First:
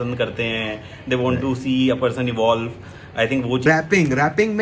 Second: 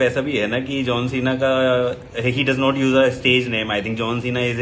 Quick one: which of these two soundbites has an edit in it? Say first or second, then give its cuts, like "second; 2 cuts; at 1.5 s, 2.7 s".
first; 1 cut; at 3.6 s